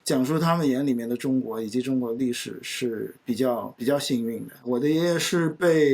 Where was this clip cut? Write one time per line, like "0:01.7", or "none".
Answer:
0:04.5